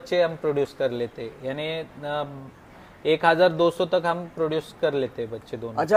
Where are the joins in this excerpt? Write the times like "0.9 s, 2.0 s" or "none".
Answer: none